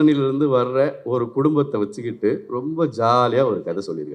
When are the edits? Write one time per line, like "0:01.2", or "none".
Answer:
none